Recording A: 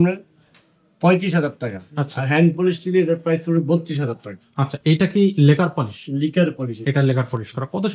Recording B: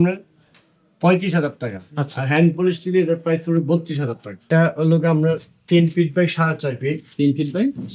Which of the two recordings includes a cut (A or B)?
B